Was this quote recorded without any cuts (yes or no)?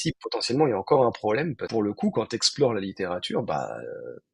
no